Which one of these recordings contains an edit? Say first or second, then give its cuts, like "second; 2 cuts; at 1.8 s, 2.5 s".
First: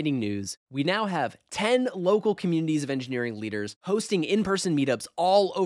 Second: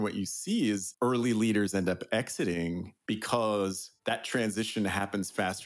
second; 2 cuts; at 2.9 s, 3.9 s